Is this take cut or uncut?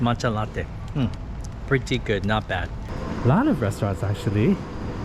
cut